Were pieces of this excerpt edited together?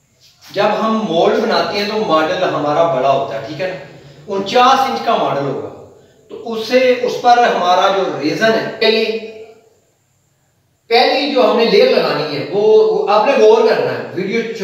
yes; 1 cut; at 8.8 s

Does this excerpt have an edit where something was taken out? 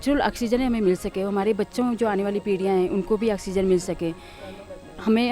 no; 0 cuts

